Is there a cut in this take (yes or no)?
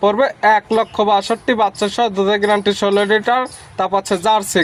no